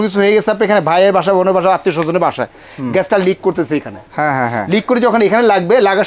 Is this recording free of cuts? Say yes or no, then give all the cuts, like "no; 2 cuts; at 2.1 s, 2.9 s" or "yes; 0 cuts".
yes; 0 cuts